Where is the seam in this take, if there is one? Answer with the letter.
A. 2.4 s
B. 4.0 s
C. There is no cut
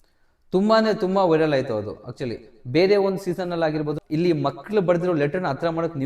B